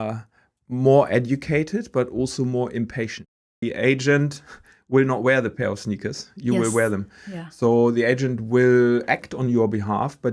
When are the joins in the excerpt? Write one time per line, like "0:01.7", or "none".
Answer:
0:03.6

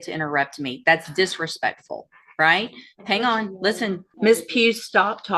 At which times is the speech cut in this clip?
0:04.1

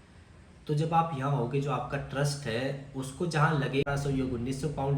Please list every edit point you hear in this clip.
0:03.8

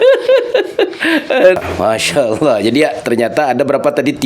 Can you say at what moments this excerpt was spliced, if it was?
0:01.6

